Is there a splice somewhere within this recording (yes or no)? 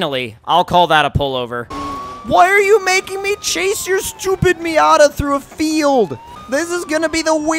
yes